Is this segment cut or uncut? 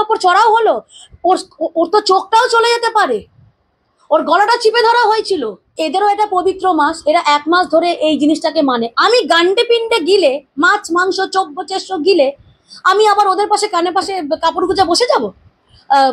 cut